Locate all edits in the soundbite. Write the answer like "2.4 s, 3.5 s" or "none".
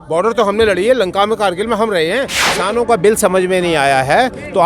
2.4 s